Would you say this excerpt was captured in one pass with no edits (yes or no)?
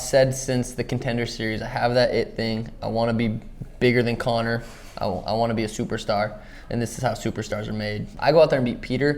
no